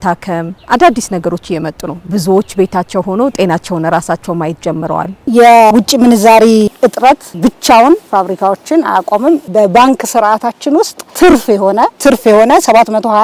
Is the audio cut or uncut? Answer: uncut